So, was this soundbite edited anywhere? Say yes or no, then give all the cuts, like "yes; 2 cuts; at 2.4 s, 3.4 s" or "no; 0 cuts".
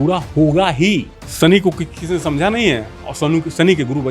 yes; 1 cut; at 1.2 s